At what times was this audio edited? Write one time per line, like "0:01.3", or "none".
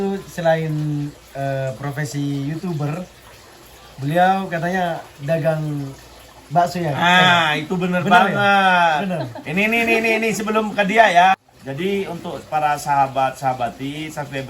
0:11.5